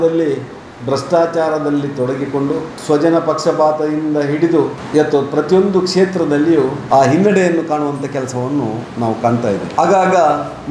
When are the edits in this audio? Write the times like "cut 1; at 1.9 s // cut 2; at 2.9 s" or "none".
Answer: cut 1; at 2.7 s // cut 2; at 4.8 s // cut 3; at 6.8 s // cut 4; at 9.8 s